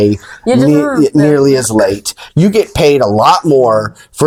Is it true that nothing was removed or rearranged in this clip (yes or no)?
yes